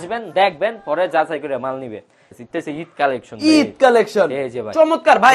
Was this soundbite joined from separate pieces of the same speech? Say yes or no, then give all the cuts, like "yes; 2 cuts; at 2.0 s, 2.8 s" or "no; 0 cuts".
yes; 1 cut; at 2.2 s